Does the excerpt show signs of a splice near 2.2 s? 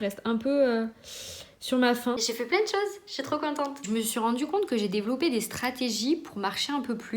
yes; 2 cuts; at 2.2 s, 3.8 s

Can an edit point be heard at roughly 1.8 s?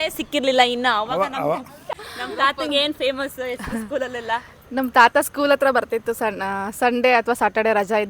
yes; 1 cut; at 1.8 s

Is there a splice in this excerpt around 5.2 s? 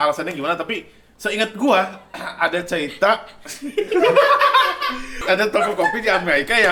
yes; 1 cut; at 5.2 s

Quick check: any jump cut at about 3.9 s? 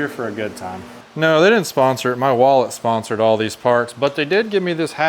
no; 1 cut; at 0.9 s

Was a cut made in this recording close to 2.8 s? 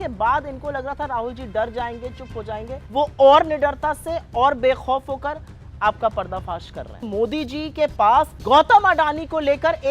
yes; 3 cuts; at 2.8 s, 7.0 s, 8.4 s

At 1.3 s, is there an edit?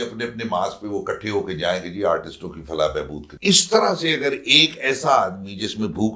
no; 1 cut; at 3.2 s

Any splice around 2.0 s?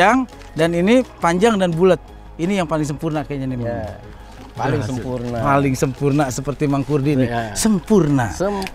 no; 0 cuts

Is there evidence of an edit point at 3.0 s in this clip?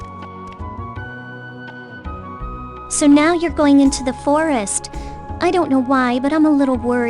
yes; 1 cut; at 3.0 s

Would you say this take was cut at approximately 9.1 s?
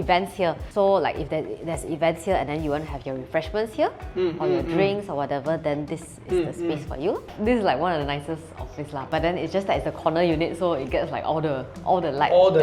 yes; 2 cuts; at 7.3 s, 9.1 s

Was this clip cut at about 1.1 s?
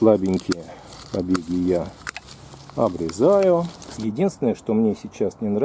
no; 1 cut; at 3.8 s

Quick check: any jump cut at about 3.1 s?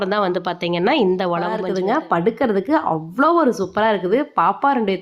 no; 1 cut; at 1.6 s

